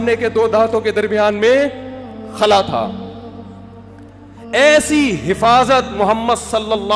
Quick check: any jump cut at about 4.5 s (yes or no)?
yes